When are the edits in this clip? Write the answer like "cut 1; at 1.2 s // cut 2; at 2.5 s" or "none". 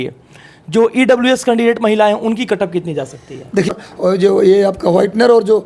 cut 1; at 3.8 s